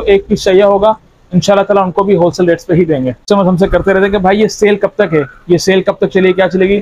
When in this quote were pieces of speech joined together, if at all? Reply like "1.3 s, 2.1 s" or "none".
3.2 s